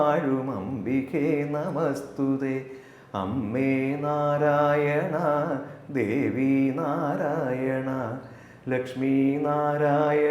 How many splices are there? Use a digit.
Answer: 0